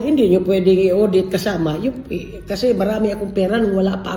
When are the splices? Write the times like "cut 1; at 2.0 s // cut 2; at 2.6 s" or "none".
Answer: none